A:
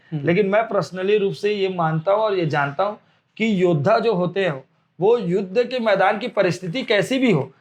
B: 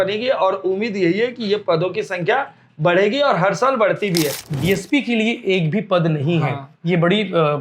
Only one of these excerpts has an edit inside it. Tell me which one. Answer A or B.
B